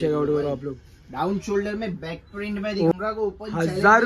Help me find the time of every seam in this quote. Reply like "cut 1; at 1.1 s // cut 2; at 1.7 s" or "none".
cut 1; at 2.9 s